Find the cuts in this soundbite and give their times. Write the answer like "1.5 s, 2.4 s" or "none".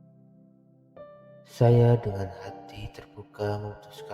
0.9 s